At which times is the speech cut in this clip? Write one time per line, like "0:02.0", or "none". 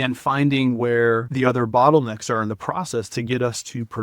0:01.3